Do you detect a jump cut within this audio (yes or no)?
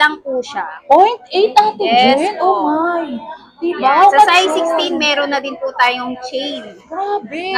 no